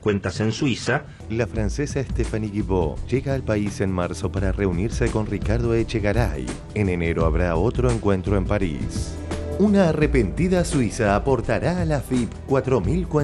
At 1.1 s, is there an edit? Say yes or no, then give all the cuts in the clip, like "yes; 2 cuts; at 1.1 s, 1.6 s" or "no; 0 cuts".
yes; 1 cut; at 1.1 s